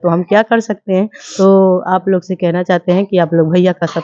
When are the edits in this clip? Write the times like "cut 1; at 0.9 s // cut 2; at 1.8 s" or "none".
cut 1; at 1.2 s